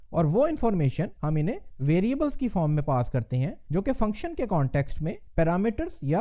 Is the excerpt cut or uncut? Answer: cut